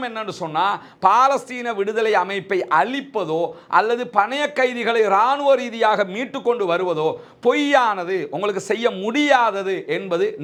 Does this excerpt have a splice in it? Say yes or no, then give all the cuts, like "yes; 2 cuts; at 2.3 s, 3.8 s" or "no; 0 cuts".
no; 0 cuts